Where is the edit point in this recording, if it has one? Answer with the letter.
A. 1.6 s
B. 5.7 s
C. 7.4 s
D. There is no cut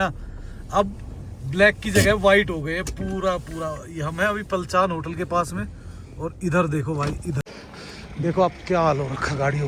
C